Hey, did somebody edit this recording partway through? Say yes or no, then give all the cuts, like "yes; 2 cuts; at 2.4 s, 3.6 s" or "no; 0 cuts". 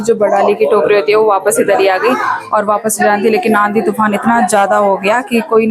no; 0 cuts